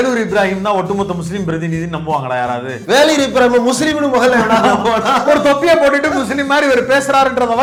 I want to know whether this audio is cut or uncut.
uncut